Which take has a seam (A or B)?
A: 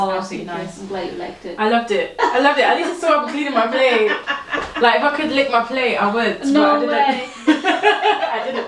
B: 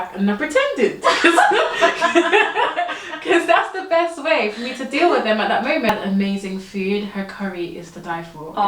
B